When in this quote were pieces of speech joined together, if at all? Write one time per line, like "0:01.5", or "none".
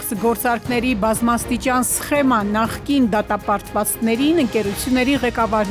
none